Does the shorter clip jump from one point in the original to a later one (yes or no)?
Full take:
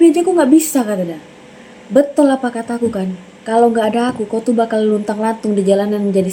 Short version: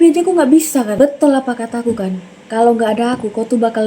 yes